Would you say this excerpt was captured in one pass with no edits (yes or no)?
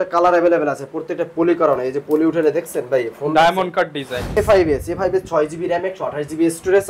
no